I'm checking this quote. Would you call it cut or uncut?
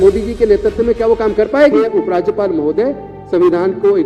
cut